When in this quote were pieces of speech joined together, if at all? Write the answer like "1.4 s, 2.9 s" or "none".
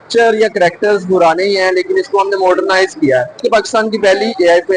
3.4 s